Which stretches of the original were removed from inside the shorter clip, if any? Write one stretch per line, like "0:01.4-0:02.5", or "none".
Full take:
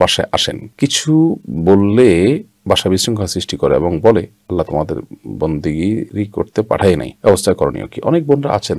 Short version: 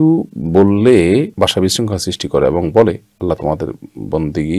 0:02.4-0:02.6